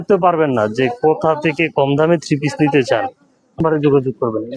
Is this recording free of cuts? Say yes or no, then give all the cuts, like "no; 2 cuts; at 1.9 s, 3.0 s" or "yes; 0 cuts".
no; 1 cut; at 3.6 s